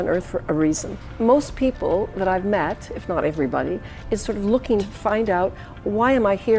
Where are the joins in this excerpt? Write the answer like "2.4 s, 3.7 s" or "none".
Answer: 1.0 s, 4.9 s